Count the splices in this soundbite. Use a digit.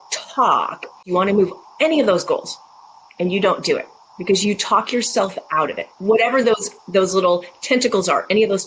1